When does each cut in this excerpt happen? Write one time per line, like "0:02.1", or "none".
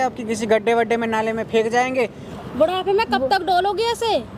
0:02.2